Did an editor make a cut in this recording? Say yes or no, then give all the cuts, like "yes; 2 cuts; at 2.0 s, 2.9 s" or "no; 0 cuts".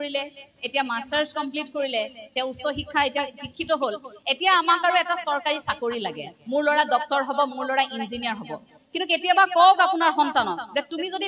no; 0 cuts